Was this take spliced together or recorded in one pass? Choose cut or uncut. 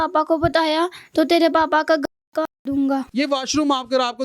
cut